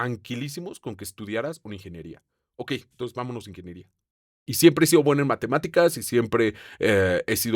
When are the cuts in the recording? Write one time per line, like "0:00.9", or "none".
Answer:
0:04.3